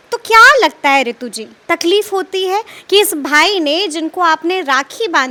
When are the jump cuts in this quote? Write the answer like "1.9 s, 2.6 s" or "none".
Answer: none